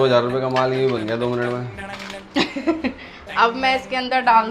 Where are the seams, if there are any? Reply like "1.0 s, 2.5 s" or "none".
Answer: none